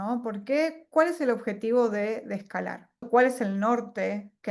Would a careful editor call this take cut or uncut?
cut